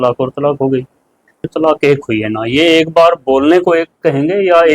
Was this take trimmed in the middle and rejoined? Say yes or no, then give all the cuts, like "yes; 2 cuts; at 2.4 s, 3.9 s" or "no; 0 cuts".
yes; 1 cut; at 1.5 s